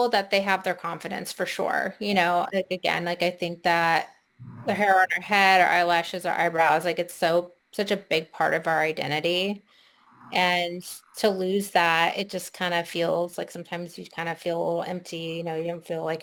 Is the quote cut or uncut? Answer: uncut